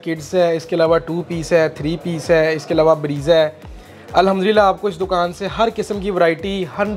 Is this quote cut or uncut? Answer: uncut